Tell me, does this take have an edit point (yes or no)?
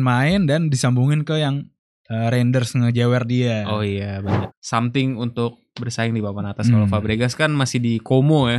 yes